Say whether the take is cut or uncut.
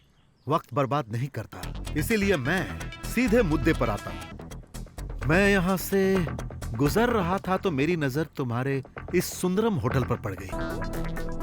cut